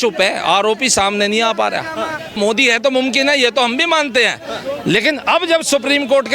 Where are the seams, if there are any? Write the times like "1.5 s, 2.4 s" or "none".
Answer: 2.4 s